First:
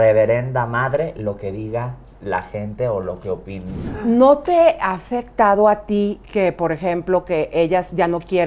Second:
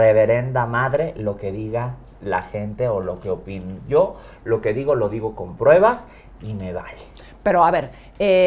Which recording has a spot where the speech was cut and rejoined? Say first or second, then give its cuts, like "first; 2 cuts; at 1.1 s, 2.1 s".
first; 1 cut; at 3.8 s